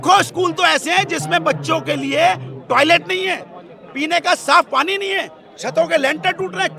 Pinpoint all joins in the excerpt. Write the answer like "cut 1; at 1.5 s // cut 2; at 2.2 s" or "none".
none